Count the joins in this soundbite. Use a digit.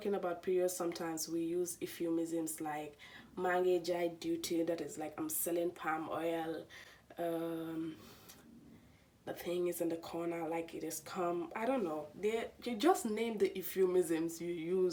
0